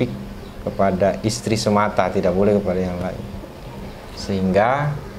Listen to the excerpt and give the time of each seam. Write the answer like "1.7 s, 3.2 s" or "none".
none